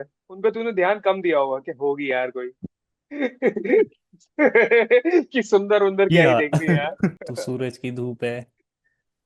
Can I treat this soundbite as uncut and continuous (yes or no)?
no